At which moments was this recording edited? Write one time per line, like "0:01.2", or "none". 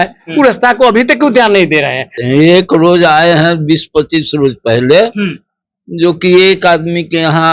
0:02.1